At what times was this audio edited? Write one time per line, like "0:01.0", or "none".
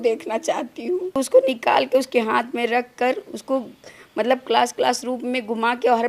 0:01.1